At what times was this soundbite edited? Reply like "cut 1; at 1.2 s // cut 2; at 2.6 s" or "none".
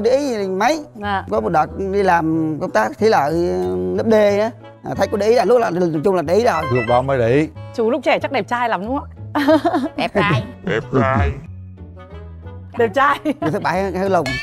cut 1; at 4.7 s // cut 2; at 7.6 s